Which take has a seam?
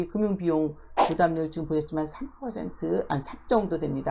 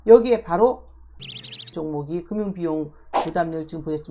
second; 1 cut; at 1.2 s

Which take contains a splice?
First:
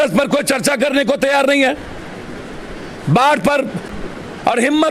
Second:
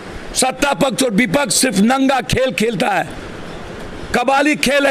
first; 1 cut; at 3.8 s

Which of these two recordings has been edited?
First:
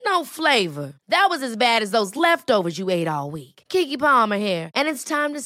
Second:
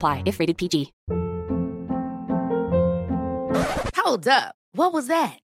second; 1 cut; at 1.0 s

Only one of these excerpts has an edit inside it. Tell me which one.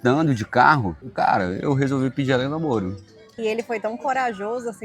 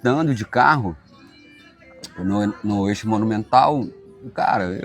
first; 2 cuts; at 1.0 s, 3.2 s

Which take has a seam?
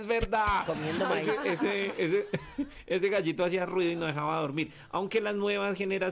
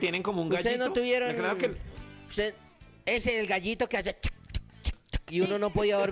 first; 1 cut; at 1.8 s

